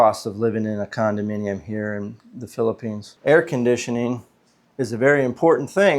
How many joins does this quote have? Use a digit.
1